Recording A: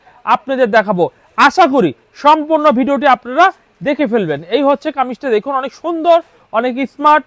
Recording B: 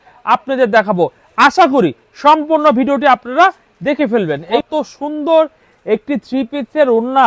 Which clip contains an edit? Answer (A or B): B